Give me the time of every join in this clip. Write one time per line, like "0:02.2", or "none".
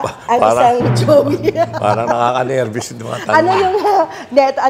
none